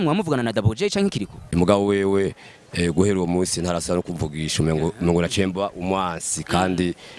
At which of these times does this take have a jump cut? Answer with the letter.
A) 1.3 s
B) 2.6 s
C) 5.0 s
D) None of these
A